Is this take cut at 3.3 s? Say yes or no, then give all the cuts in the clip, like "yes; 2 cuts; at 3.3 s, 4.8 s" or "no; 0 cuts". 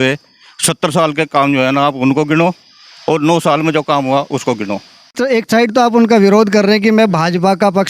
no; 1 cut; at 5.1 s